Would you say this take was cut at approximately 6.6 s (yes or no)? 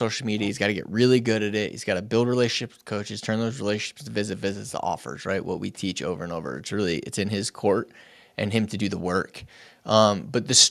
no